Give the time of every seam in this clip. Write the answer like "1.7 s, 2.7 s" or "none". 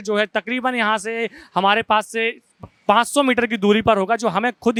none